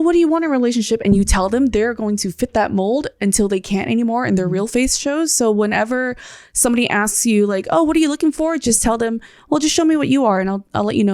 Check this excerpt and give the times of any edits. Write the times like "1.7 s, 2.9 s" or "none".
none